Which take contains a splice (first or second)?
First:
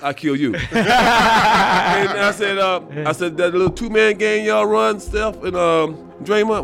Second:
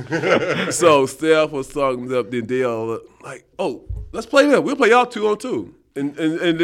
second